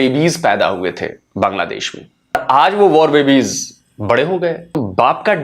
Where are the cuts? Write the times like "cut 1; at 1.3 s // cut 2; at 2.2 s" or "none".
cut 1; at 2.3 s // cut 2; at 4.8 s